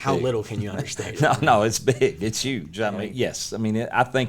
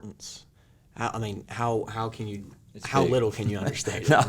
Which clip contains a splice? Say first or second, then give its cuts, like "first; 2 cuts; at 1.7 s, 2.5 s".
first; 1 cut; at 2.8 s